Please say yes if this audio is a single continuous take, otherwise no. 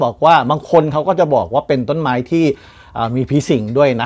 yes